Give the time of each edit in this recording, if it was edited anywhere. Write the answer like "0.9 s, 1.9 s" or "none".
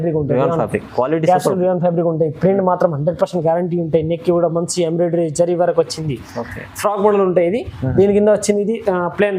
none